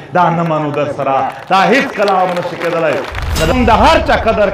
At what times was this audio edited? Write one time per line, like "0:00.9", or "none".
0:03.5